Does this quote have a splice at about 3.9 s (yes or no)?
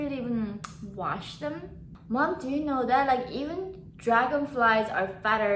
no